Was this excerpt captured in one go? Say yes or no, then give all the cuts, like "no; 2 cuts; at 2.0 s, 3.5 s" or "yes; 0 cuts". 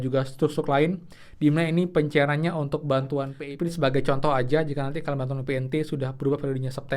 no; 1 cut; at 3.4 s